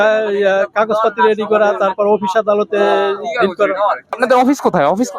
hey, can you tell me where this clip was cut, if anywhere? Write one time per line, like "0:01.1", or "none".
0:04.2